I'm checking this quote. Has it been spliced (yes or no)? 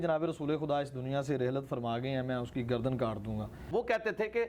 yes